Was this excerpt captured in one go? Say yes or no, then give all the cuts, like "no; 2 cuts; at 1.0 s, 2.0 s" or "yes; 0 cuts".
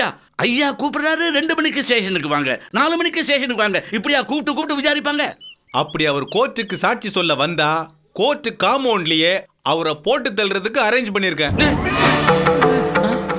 no; 1 cut; at 5.4 s